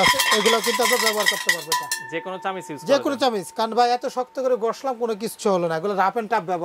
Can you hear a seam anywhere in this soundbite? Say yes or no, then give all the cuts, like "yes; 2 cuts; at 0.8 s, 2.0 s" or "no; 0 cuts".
no; 0 cuts